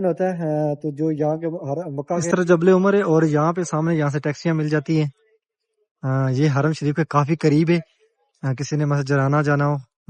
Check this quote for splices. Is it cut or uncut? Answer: cut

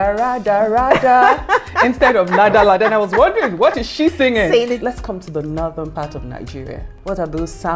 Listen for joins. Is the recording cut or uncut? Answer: cut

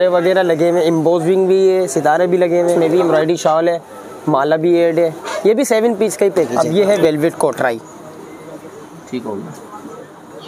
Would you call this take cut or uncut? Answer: cut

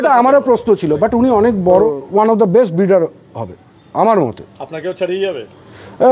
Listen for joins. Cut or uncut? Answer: cut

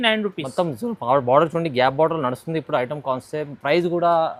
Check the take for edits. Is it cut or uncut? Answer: uncut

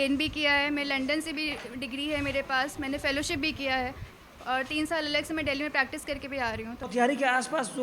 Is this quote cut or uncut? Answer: cut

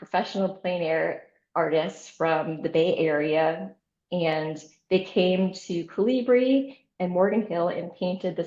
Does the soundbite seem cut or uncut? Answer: uncut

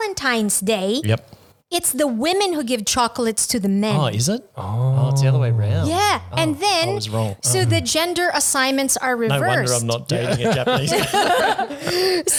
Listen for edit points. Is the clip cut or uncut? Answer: uncut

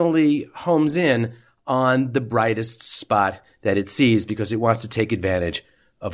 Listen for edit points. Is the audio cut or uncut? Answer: uncut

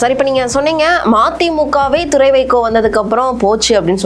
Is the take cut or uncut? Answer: uncut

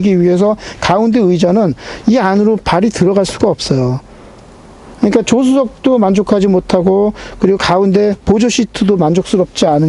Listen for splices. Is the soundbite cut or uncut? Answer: uncut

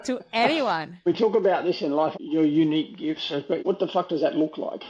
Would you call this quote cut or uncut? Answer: cut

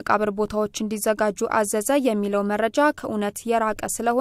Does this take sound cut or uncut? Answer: uncut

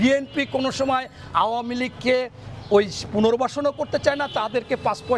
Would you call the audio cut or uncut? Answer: uncut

